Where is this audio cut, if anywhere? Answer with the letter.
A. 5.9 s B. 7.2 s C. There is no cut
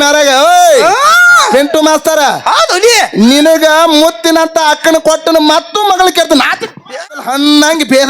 B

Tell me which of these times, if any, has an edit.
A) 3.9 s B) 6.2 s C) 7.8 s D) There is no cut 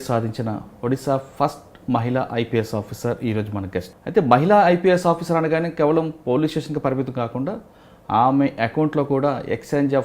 A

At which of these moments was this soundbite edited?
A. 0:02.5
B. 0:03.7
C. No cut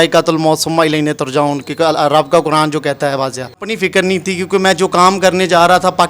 B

